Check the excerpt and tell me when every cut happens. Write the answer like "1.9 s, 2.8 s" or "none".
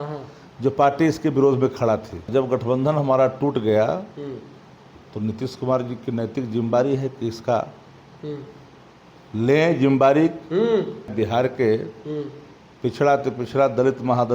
2.3 s, 11.1 s